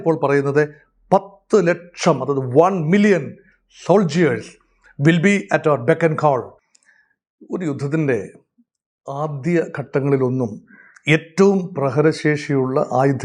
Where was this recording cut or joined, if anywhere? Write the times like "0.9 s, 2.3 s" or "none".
6.9 s